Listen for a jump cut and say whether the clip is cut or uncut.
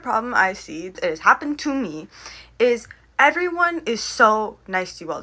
cut